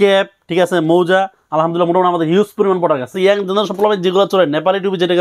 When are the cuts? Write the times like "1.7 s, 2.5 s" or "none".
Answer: 3.1 s